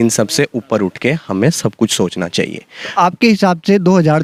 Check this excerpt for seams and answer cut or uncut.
uncut